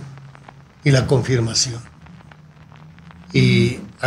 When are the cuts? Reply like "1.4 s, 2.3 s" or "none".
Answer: none